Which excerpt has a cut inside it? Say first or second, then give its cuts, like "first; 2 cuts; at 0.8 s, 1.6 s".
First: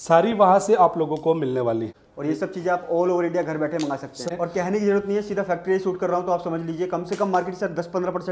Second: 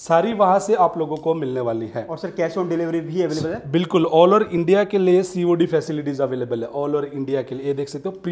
first; 2 cuts; at 1.9 s, 4.3 s